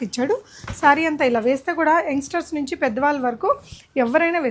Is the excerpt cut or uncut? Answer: uncut